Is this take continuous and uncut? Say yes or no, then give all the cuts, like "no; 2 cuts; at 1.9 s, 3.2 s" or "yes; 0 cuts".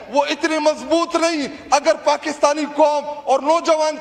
yes; 0 cuts